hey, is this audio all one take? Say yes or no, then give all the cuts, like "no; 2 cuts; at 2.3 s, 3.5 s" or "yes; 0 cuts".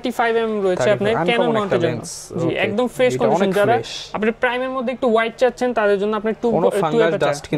yes; 0 cuts